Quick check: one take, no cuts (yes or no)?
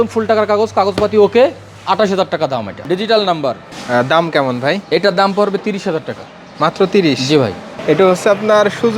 no